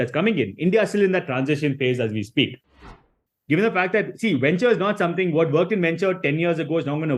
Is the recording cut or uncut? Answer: cut